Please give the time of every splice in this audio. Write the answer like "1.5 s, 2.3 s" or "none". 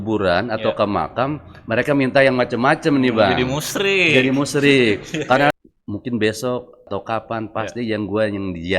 5.5 s, 6.9 s